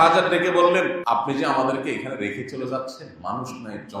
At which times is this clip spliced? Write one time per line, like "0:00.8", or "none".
0:01.0